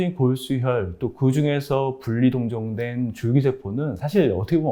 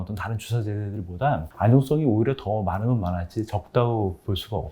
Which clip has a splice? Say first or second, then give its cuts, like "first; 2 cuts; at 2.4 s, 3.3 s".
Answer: second; 1 cut; at 1.5 s